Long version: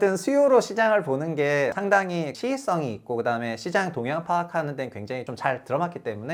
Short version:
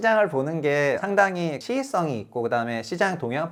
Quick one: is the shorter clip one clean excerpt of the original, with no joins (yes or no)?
yes